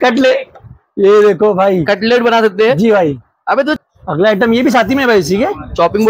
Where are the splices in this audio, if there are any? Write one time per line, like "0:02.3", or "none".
0:03.8